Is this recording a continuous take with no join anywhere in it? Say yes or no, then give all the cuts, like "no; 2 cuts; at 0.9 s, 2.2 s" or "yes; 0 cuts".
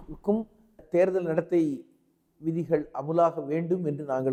yes; 0 cuts